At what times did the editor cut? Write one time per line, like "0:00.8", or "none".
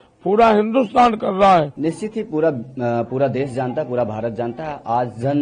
0:01.7